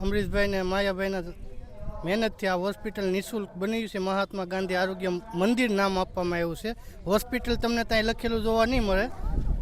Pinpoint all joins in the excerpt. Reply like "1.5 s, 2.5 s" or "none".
none